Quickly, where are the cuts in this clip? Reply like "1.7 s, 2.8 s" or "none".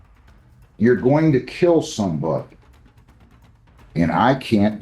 2.5 s, 3.9 s